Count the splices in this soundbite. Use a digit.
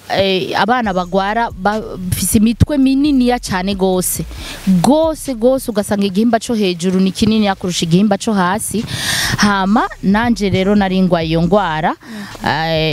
0